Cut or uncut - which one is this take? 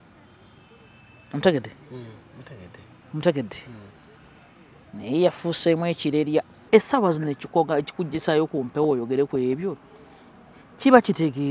cut